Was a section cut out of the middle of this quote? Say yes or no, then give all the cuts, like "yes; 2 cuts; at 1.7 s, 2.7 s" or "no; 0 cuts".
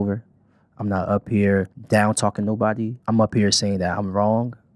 yes; 2 cuts; at 1.8 s, 3.0 s